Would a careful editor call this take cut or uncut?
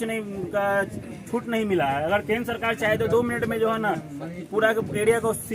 uncut